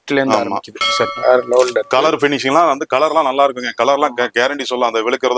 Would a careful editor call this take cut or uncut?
cut